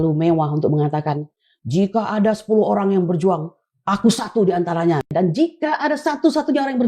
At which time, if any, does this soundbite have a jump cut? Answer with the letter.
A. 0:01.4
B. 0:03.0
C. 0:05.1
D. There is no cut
C